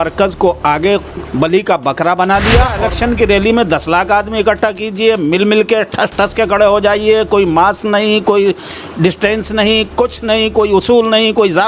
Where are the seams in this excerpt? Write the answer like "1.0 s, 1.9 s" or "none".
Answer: 2.8 s

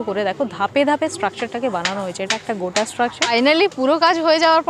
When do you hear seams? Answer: 3.3 s

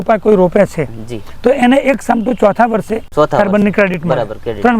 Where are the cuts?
3.1 s

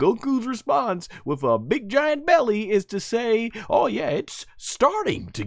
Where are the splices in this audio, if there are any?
none

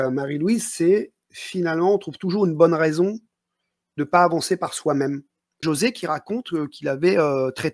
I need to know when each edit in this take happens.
5.6 s

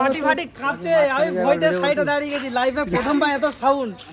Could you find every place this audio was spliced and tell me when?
none

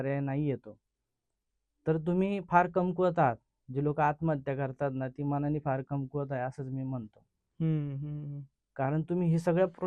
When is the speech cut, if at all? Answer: none

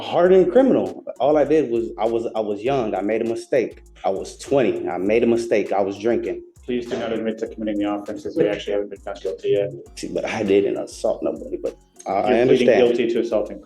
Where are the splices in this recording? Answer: 3.8 s, 6.5 s, 9.9 s

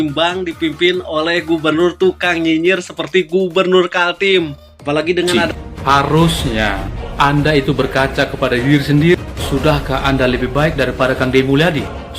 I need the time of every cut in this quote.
5.4 s

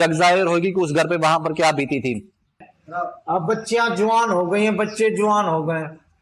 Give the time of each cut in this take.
2.6 s

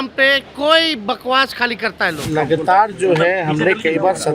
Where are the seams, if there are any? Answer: 2.2 s

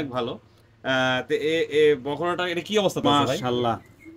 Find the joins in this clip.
3.0 s

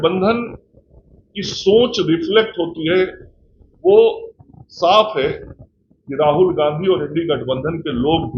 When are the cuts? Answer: none

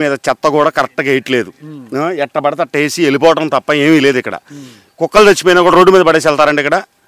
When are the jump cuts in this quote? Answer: none

